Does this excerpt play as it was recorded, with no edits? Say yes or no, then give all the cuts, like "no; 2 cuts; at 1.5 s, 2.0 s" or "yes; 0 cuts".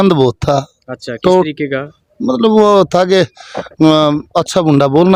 yes; 0 cuts